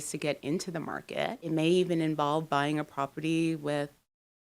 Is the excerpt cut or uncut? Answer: cut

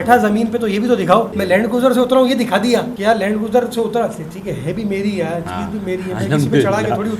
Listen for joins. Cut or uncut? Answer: cut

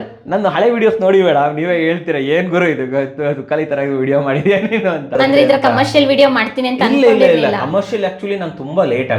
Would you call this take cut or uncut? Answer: cut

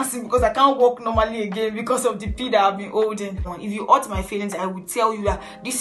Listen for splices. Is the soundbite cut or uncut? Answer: cut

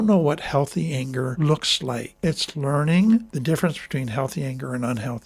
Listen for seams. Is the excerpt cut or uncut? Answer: cut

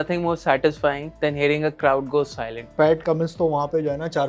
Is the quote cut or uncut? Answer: cut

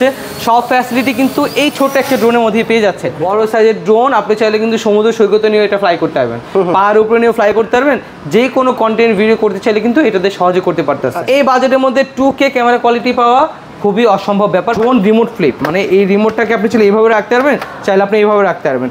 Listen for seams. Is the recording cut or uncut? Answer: cut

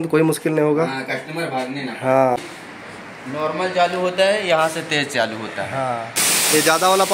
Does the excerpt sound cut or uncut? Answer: cut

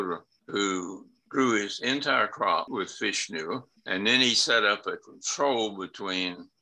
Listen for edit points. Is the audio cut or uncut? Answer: cut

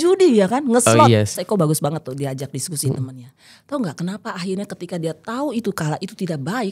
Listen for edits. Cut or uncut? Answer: cut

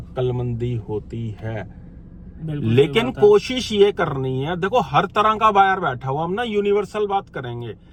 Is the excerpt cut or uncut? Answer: uncut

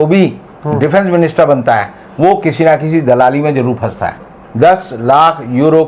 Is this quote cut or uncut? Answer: cut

